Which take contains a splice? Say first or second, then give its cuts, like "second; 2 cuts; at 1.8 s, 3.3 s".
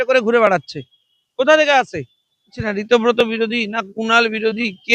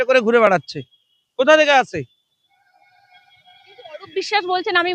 first; 1 cut; at 2.5 s